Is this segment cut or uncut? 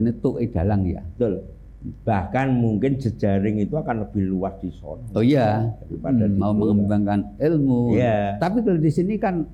uncut